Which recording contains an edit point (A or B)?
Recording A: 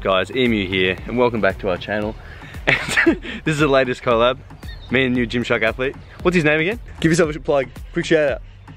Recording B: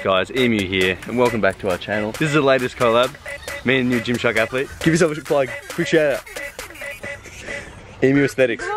B